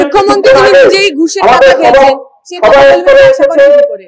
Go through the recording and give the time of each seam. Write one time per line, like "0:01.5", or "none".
none